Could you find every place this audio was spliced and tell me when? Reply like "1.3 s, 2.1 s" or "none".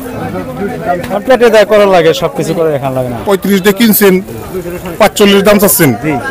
none

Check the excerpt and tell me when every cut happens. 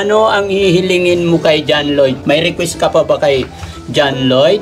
2.2 s

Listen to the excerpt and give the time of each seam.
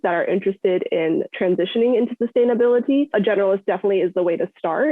3.1 s

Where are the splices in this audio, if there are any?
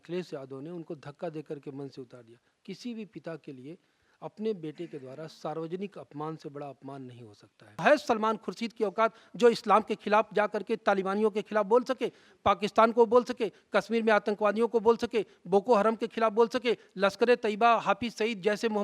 7.8 s

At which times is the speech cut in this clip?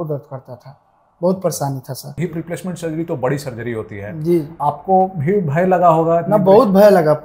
2.1 s, 4.5 s

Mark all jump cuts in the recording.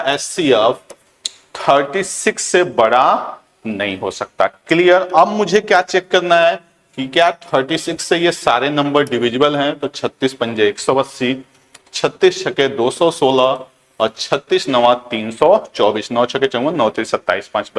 none

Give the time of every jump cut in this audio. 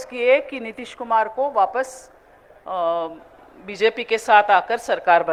none

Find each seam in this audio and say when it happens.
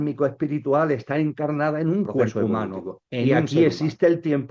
3.3 s

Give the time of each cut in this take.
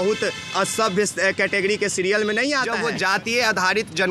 2.7 s

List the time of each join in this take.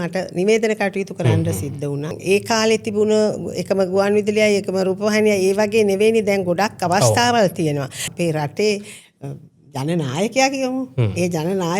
2.2 s, 8.0 s

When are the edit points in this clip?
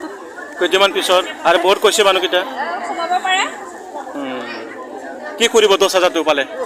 none

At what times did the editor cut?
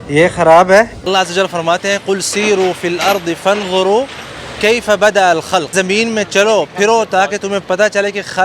1.0 s, 5.7 s

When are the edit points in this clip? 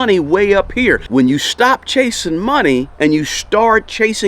1.0 s, 2.9 s

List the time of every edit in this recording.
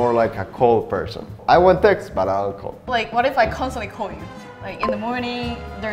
1.4 s, 2.7 s

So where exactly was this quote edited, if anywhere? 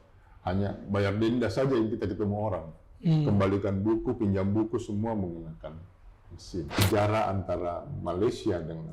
6.8 s

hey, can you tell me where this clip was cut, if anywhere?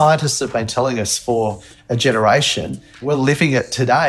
3.0 s

